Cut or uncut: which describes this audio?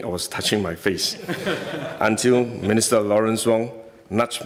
uncut